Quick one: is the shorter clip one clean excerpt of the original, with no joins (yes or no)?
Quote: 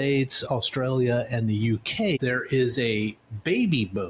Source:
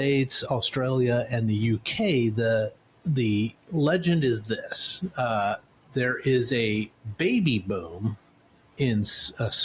no